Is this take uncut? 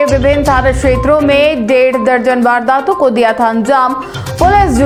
yes; 0 cuts

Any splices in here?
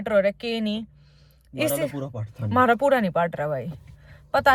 no; 0 cuts

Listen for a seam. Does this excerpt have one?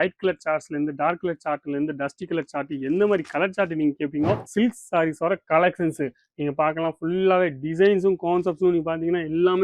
yes; 1 cut; at 4.4 s

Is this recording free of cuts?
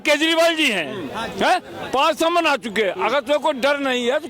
yes; 0 cuts

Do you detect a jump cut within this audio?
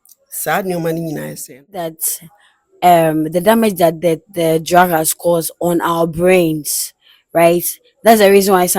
yes; 1 cut; at 1.9 s

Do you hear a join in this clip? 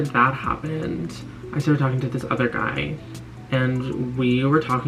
no; 0 cuts

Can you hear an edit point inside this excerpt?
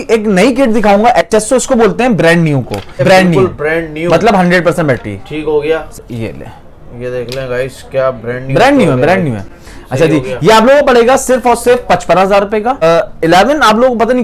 yes; 3 cuts; at 3.0 s, 5.9 s, 12.8 s

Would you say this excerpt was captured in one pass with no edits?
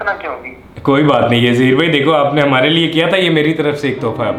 yes; 0 cuts

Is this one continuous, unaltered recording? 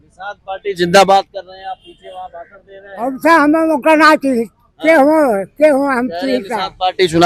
yes; 0 cuts

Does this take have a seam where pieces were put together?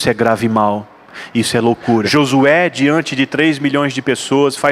yes; 1 cut; at 2.1 s

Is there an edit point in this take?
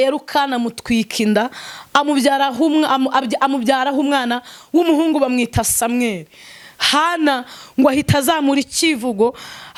no; 0 cuts

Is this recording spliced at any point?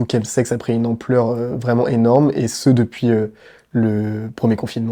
no; 0 cuts

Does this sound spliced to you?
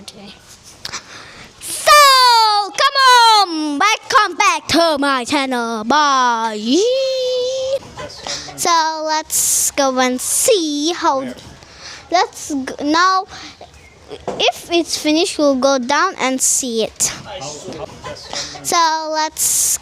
yes; 2 cuts; at 7.8 s, 17.8 s

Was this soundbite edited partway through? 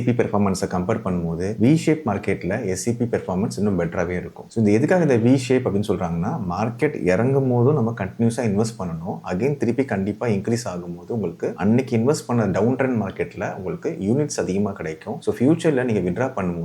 no; 0 cuts

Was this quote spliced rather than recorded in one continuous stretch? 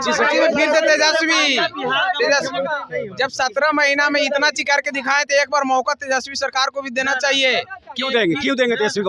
no; 0 cuts

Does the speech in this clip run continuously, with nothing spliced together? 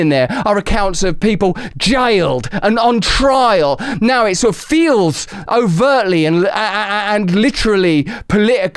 no; 1 cut; at 3.9 s

